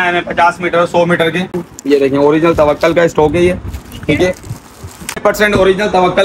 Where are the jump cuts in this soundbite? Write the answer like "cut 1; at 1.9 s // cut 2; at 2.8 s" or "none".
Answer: cut 1; at 1.5 s // cut 2; at 5.2 s